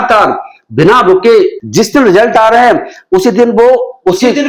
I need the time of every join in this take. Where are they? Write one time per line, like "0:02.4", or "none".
0:01.6